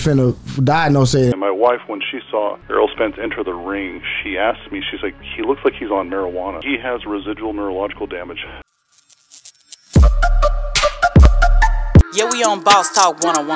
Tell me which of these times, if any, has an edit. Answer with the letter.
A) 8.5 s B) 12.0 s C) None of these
A